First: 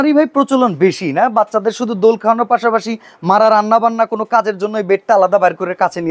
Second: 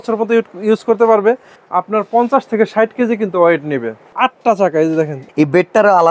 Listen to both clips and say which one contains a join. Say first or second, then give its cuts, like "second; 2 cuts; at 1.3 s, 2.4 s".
second; 3 cuts; at 1.5 s, 4.0 s, 5.2 s